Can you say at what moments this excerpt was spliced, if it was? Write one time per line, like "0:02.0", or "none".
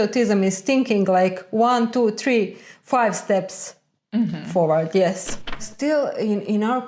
0:05.6